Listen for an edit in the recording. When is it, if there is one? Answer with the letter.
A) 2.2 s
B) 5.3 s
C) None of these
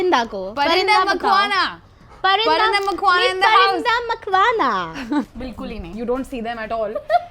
B